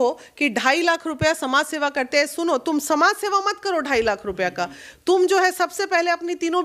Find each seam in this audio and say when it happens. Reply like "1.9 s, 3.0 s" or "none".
none